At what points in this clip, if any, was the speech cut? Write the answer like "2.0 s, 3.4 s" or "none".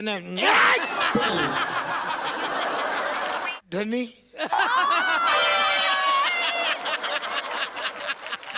3.5 s

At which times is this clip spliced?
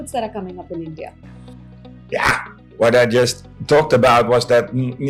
none

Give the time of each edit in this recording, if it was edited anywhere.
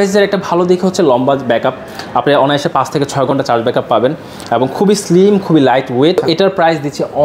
6.2 s

